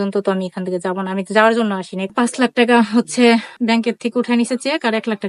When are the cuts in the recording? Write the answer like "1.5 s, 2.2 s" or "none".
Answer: 2.1 s, 3.6 s